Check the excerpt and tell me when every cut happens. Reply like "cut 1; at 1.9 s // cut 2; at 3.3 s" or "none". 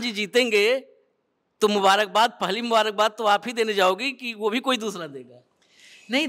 none